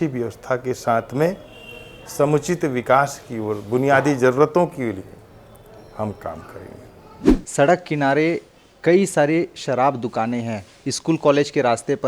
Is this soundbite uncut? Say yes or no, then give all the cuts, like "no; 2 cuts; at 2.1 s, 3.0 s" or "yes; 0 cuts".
no; 1 cut; at 7.3 s